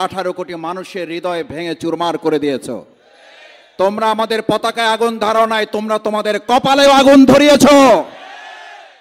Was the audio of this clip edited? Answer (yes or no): no